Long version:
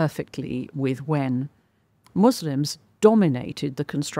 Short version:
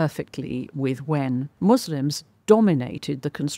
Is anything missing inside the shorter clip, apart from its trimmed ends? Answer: yes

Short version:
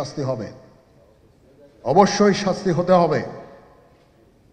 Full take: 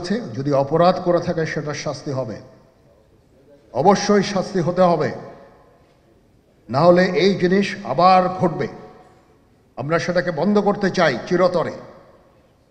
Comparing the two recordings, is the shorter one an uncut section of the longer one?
yes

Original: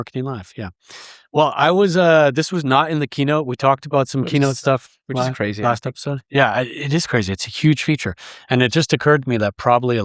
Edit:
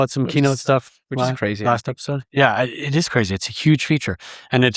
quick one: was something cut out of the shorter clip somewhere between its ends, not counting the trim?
no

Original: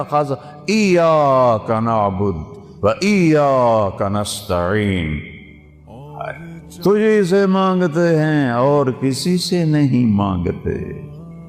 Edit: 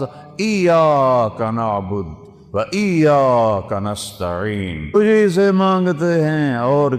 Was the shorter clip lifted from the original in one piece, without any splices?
no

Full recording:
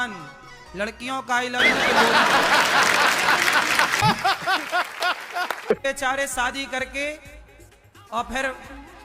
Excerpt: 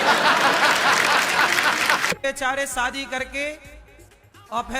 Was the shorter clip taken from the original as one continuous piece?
no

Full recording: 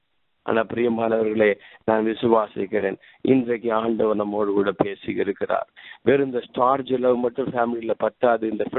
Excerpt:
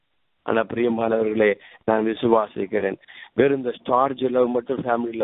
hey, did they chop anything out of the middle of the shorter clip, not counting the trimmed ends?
yes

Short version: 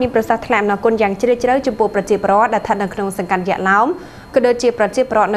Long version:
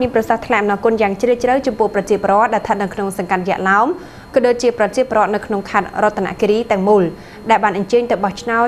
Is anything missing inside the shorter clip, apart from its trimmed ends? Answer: no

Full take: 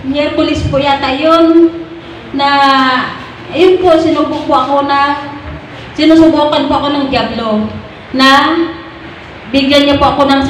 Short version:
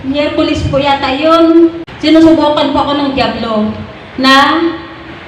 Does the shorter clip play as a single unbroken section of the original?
no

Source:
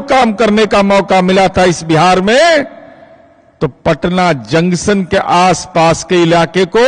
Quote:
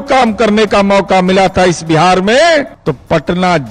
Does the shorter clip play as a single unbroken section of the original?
no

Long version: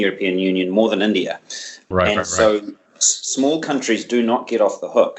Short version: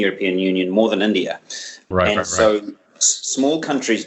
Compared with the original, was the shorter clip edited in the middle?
no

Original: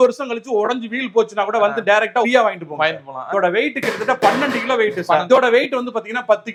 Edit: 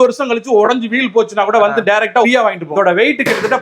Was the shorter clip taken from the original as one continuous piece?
no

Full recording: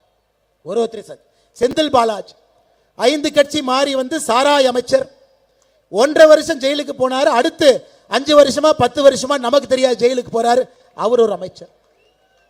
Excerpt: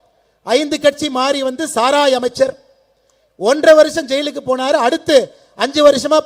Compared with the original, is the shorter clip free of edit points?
yes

